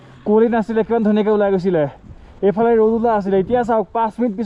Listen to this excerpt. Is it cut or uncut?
uncut